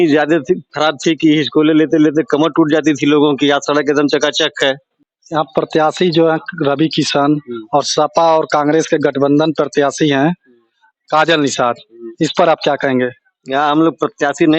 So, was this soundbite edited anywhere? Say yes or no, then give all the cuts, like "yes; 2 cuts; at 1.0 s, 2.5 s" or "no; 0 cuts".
no; 0 cuts